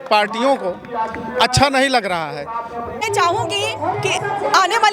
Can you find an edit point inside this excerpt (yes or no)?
yes